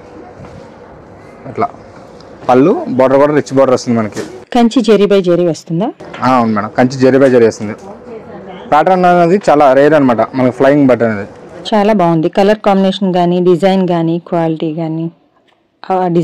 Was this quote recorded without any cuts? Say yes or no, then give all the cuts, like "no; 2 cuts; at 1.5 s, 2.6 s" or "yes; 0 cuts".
yes; 0 cuts